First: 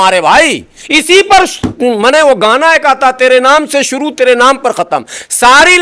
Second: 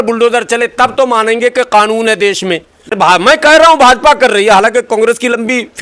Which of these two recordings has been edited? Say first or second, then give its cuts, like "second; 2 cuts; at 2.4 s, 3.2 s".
second; 1 cut; at 2.9 s